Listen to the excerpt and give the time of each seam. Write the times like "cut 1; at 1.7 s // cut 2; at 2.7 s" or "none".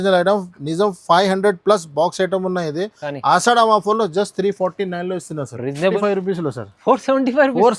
cut 1; at 5.9 s